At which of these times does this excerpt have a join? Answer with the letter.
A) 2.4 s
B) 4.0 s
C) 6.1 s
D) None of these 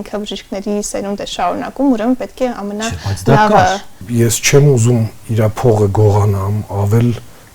B